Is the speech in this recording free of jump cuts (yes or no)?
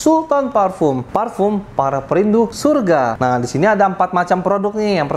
no